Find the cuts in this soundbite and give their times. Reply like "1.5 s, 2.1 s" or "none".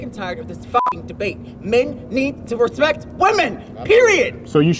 none